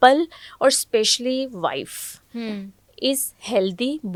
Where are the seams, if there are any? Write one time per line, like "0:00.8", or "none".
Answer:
none